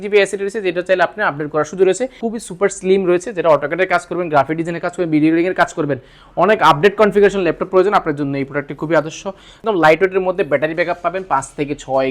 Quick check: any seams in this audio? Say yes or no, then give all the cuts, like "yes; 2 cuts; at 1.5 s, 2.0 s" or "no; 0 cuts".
yes; 2 cuts; at 2.2 s, 9.6 s